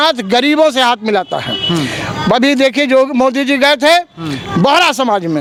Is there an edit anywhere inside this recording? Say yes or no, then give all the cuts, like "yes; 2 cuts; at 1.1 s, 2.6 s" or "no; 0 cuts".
no; 0 cuts